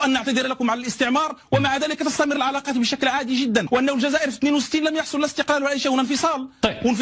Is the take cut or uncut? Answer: cut